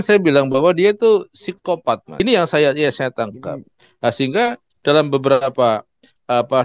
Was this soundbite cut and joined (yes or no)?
yes